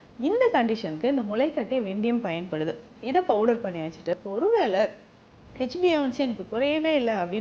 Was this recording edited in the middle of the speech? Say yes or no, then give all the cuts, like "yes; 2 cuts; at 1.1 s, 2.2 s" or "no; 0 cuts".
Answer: yes; 1 cut; at 4.1 s